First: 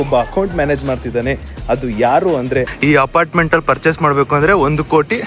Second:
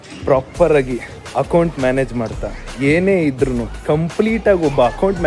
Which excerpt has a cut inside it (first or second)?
first